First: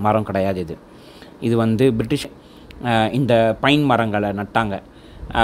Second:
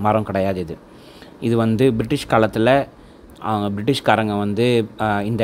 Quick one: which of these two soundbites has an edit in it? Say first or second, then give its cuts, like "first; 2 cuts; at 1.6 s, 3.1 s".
first; 1 cut; at 2.3 s